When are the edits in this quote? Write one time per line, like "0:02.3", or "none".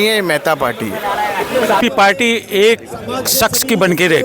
0:01.8